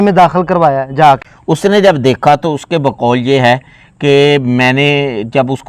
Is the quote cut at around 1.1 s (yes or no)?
yes